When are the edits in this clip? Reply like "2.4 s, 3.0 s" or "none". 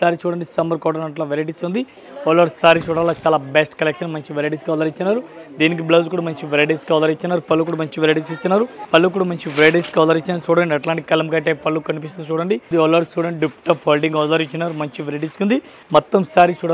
2.0 s, 8.8 s, 12.6 s, 15.7 s